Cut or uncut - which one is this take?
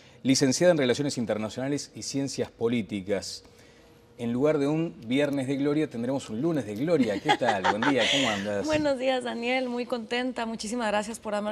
uncut